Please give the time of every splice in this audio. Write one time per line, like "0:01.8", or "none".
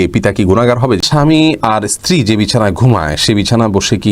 0:01.0